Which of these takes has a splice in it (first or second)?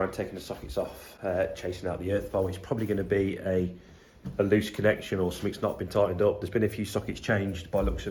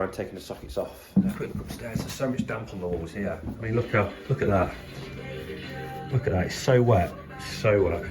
second